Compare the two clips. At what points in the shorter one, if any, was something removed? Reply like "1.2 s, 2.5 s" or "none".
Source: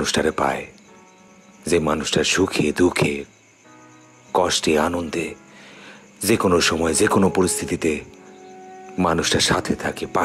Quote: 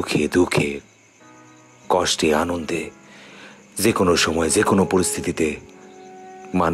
none

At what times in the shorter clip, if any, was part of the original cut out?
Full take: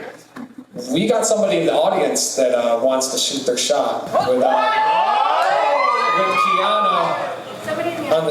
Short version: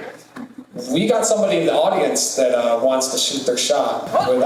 none

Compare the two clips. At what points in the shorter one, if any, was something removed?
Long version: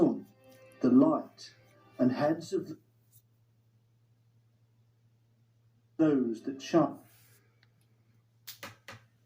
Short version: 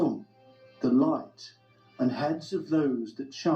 2.6 s

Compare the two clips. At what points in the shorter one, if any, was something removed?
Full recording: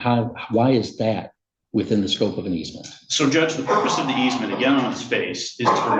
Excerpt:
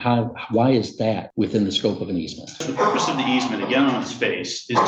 1.3 s, 2.7 s

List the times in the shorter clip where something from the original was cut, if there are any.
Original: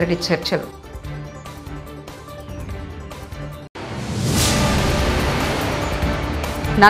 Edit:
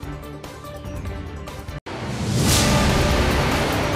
1.8 s

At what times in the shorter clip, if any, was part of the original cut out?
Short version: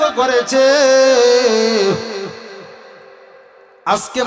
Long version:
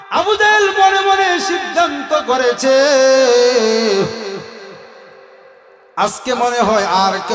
none

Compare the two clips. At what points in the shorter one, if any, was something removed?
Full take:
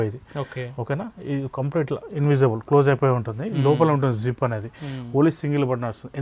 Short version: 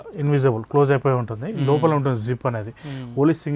none

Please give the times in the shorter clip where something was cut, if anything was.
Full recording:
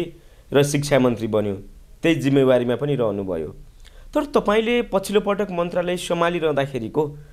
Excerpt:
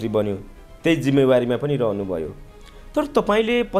none

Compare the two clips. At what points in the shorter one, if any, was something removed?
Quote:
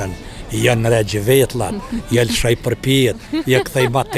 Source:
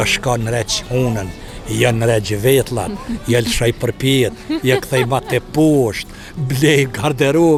none

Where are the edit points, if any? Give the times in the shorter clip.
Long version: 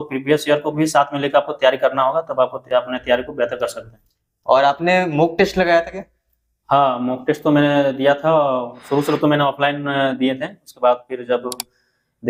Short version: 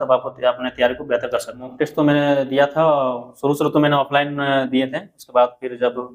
1.7 s

